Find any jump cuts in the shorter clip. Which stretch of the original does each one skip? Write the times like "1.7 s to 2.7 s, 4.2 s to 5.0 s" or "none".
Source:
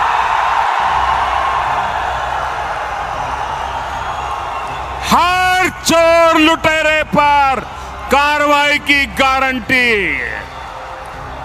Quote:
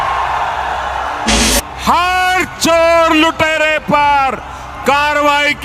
2.8 s to 4.7 s

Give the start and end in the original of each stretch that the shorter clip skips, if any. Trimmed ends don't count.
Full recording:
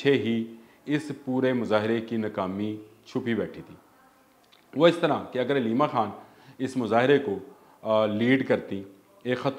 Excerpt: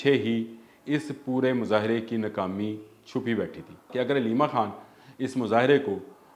3.9 s to 5.3 s

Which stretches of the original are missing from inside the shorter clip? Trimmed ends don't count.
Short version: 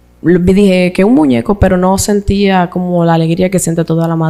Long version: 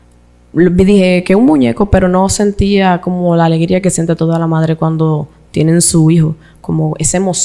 none

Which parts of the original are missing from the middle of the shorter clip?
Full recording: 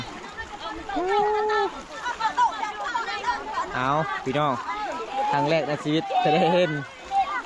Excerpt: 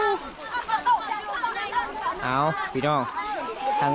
none

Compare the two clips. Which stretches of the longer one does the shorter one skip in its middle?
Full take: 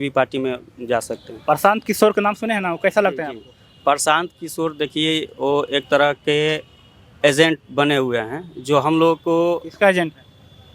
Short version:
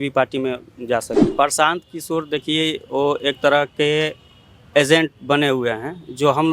1.2 s to 3.7 s

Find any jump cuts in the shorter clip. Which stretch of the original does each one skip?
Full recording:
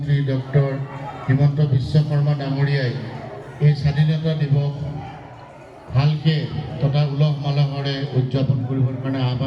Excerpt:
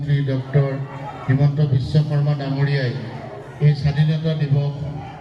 none

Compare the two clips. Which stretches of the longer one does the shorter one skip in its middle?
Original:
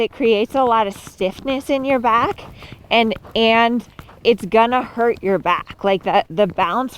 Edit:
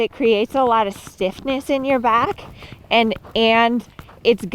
none

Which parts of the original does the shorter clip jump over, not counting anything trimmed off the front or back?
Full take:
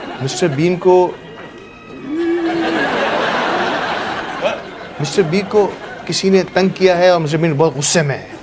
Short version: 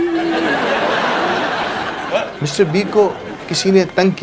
4.7 s to 5.0 s

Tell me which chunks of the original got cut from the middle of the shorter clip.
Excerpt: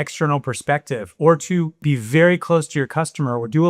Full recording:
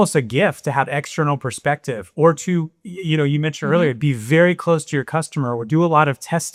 2.8 s to 4.0 s

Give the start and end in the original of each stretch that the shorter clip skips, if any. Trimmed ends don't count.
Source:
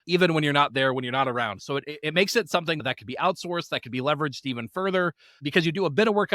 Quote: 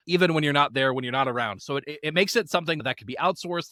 none

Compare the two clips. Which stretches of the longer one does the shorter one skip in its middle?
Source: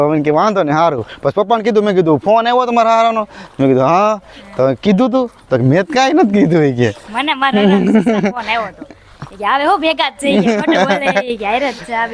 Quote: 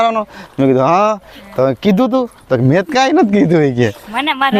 none

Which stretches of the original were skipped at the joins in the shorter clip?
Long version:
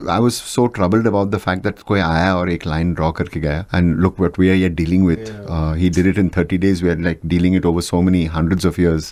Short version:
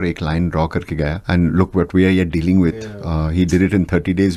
none

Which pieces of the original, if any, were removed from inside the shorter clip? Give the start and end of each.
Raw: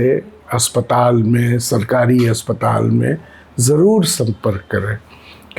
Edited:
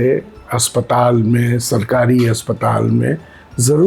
none

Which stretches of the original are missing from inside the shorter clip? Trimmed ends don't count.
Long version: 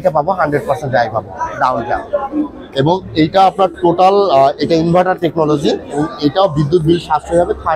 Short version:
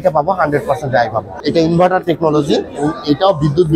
1.4 s to 4.6 s

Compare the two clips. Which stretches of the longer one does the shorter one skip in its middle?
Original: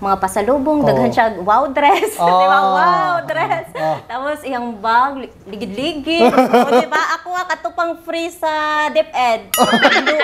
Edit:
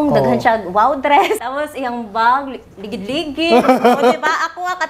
2.1 s to 4.1 s

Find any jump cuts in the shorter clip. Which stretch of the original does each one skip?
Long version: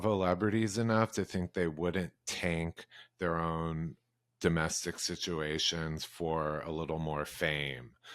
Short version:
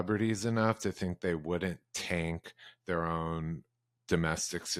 none

